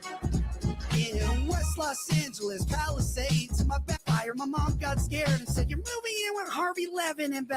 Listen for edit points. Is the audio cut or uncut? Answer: cut